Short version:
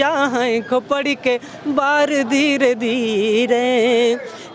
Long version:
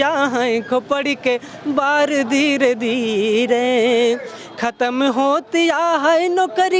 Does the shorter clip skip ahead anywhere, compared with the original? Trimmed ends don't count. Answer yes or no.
no